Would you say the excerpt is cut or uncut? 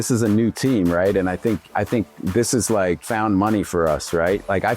cut